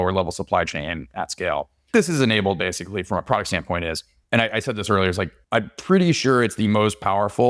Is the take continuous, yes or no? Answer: no